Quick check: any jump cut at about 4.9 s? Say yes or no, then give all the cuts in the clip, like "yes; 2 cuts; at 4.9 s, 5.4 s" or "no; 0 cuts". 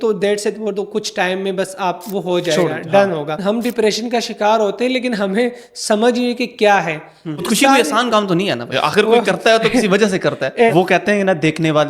no; 4 cuts; at 3.4 s, 7.4 s, 8.7 s, 10.7 s